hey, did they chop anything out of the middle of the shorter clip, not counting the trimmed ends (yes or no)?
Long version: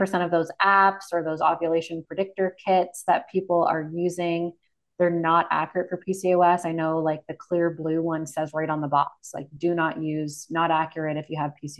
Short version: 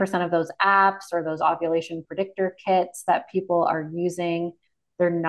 no